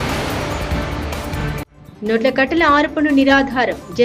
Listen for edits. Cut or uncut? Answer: cut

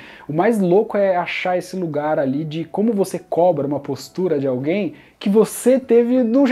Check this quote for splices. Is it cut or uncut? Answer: uncut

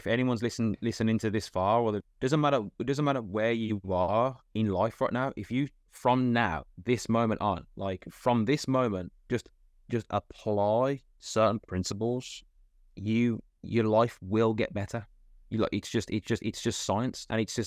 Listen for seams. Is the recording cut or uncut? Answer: cut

